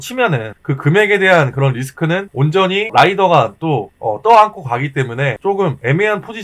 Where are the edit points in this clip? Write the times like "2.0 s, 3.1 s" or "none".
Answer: 2.4 s, 3.9 s, 5.6 s